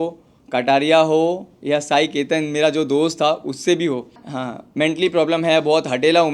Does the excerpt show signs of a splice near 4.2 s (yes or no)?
yes